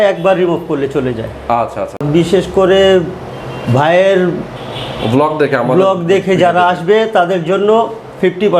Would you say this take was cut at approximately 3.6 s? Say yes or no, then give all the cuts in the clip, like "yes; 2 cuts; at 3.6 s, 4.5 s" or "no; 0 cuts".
no; 1 cut; at 2.0 s